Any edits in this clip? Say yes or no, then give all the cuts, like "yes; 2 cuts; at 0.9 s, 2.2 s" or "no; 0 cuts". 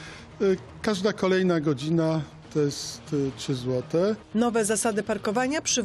yes; 1 cut; at 4.2 s